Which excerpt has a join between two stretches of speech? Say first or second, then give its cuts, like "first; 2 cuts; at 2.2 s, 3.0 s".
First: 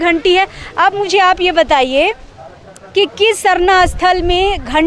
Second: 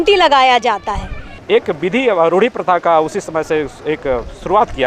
second; 1 cut; at 1.4 s